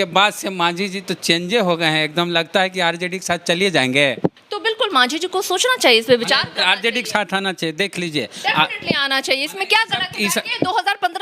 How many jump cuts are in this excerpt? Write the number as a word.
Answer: one